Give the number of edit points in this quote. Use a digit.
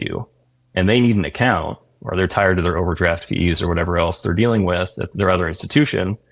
1